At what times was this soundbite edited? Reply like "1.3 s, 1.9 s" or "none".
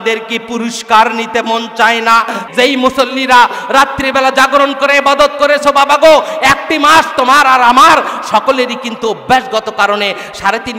2.4 s